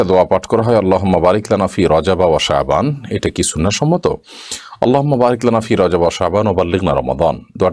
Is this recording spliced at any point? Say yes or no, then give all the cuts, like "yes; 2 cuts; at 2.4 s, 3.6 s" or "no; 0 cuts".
no; 0 cuts